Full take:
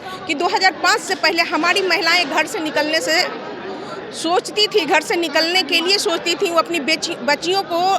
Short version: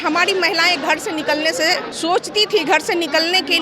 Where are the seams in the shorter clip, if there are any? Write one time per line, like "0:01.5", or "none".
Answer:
0:01.9